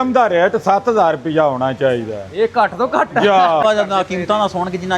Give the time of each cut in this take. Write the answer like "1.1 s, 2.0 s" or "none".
3.6 s